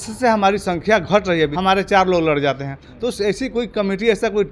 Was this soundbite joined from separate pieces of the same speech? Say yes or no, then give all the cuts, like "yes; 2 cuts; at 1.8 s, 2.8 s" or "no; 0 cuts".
yes; 1 cut; at 1.5 s